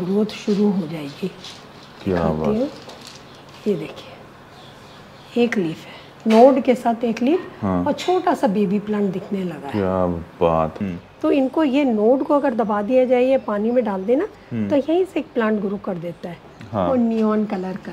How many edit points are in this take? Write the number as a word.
two